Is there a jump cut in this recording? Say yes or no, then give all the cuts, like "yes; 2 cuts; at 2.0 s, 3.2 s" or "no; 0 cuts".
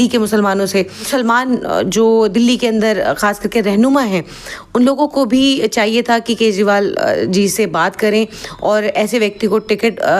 yes; 1 cut; at 1.1 s